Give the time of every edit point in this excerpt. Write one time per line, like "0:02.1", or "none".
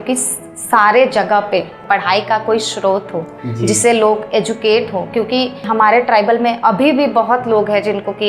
0:01.8
0:05.7